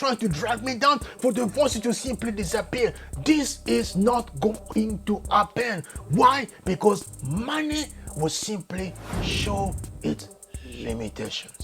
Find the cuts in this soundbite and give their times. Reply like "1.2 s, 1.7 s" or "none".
none